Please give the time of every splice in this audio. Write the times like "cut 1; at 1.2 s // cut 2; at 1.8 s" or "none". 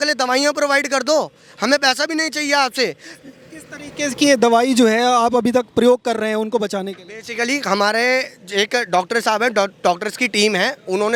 none